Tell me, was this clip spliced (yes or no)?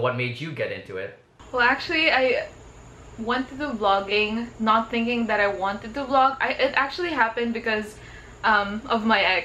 no